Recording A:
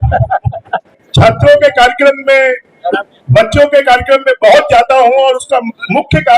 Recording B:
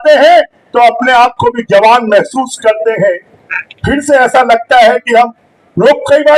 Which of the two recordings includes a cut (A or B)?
A